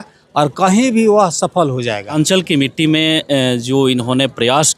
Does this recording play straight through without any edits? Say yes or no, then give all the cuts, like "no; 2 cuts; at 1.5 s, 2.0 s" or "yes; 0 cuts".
no; 1 cut; at 2.1 s